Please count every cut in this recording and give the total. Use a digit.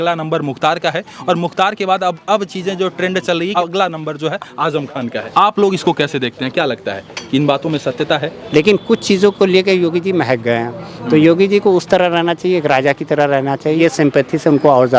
4